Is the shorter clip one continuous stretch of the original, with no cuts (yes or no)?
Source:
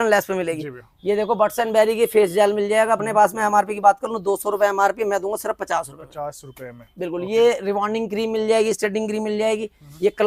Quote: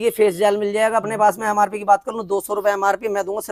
yes